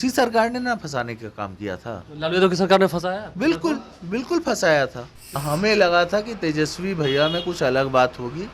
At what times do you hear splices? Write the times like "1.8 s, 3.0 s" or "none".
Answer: 5.4 s